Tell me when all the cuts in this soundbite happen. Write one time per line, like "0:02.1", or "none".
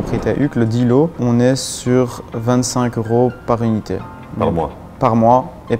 0:01.2
0:04.4